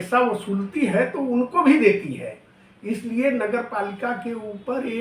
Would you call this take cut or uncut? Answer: uncut